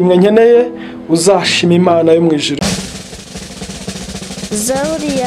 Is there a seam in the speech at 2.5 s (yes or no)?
yes